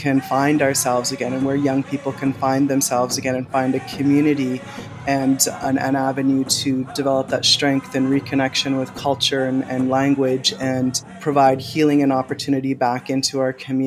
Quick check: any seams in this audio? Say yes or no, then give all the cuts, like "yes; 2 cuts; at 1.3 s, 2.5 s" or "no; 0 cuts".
no; 0 cuts